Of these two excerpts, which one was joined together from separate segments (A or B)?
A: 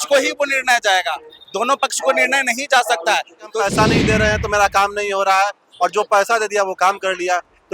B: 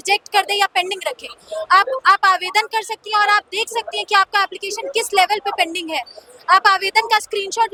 A